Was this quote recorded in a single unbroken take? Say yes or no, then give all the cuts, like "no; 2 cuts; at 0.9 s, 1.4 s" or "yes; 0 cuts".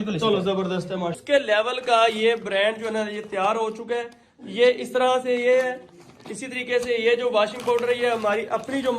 no; 1 cut; at 1.2 s